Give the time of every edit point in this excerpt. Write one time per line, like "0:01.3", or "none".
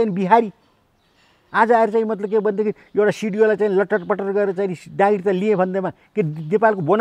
none